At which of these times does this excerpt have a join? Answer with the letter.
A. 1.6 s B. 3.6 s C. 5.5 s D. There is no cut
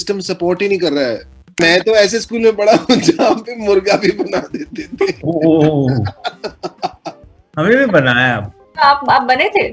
A